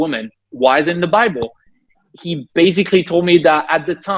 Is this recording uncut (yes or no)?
yes